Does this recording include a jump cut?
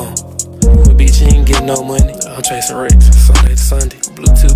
no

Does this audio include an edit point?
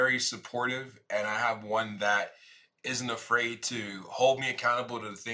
no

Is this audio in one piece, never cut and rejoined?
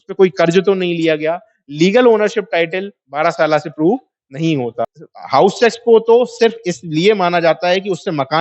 no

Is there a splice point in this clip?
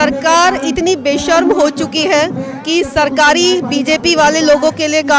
no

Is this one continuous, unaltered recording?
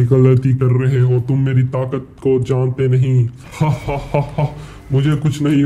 no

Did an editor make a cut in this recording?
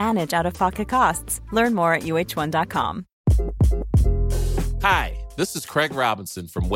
yes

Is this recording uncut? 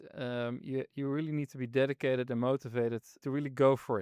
no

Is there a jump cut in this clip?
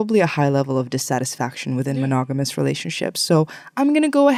no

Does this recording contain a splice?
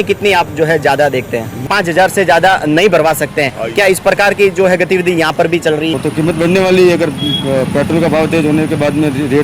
yes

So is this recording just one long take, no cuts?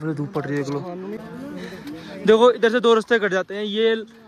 no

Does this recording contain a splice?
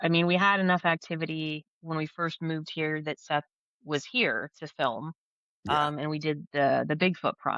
no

